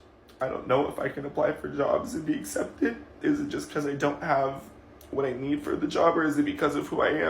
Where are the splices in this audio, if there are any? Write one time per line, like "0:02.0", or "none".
0:03.2